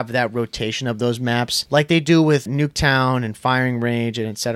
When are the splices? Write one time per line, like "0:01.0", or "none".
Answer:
0:01.6
0:02.5